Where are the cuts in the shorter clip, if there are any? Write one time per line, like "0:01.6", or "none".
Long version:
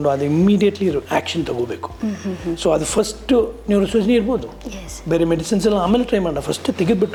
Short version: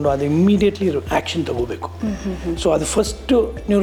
none